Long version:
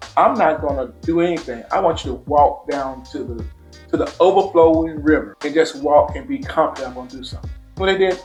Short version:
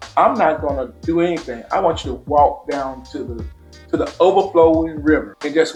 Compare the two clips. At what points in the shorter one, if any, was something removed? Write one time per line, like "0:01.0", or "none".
none